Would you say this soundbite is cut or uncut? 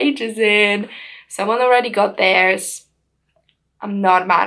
uncut